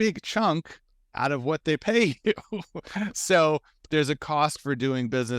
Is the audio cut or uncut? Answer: uncut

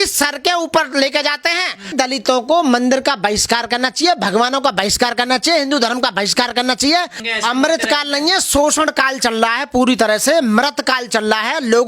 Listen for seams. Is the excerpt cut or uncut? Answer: cut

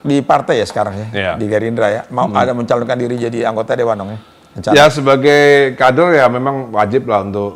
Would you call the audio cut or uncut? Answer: uncut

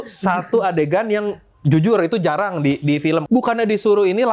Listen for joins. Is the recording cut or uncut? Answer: cut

